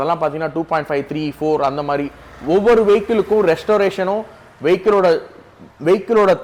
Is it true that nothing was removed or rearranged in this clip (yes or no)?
yes